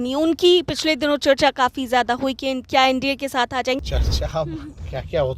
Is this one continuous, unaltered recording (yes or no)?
no